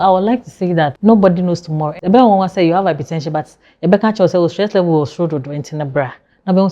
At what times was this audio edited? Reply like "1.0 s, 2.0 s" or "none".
0.9 s, 1.9 s